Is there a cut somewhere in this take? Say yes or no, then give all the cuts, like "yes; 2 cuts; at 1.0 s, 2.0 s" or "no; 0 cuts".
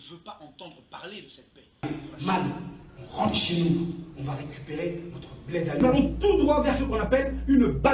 yes; 2 cuts; at 1.8 s, 5.8 s